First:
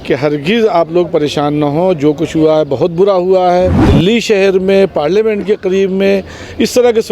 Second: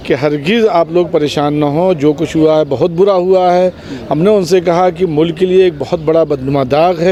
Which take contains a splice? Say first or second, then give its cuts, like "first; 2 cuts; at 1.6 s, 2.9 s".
first; 1 cut; at 3.8 s